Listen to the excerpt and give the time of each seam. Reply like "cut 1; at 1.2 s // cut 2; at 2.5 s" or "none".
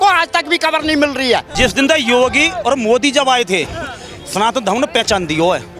cut 1; at 1.5 s